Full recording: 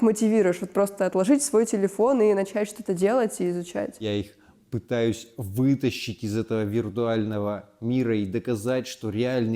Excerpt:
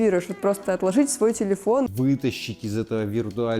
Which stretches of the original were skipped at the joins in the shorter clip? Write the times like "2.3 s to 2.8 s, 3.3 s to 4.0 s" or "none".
2.2 s to 5.4 s